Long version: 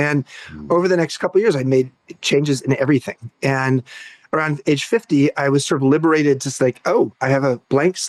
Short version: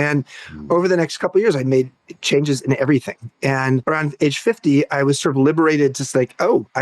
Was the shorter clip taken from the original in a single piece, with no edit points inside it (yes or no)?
no